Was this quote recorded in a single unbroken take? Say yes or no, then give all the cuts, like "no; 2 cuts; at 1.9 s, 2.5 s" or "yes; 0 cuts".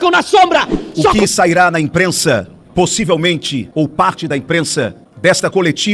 no; 3 cuts; at 1.2 s, 3.6 s, 5.0 s